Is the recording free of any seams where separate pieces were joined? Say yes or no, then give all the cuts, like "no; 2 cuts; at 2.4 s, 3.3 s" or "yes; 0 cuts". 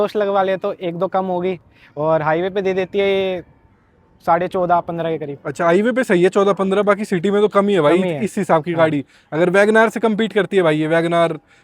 yes; 0 cuts